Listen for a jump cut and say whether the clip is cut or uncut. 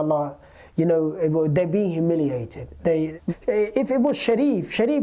cut